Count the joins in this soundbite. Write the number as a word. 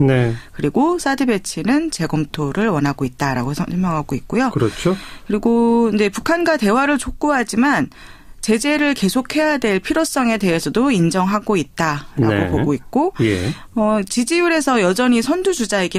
zero